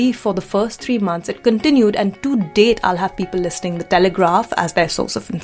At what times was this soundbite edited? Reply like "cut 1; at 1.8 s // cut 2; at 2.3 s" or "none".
none